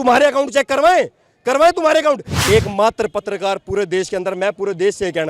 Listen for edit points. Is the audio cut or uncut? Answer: cut